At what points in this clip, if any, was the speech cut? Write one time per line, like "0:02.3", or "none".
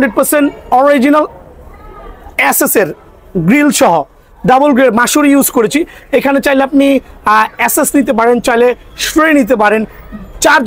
none